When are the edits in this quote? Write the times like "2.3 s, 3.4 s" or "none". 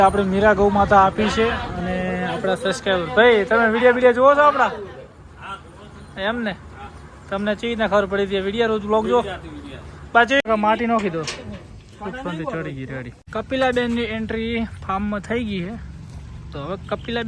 10.5 s, 13.3 s